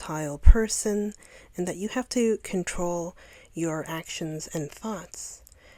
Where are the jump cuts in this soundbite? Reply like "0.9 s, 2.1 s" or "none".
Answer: none